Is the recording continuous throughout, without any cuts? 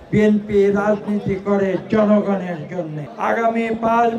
no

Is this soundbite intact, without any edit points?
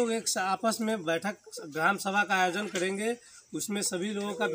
yes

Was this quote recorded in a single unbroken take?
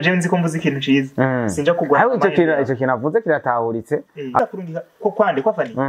no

